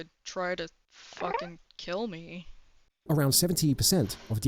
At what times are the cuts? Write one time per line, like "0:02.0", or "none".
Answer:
none